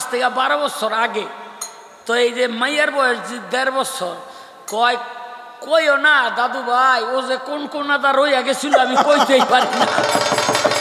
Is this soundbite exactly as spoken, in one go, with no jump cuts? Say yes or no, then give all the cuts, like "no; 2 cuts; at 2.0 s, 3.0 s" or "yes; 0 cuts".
yes; 0 cuts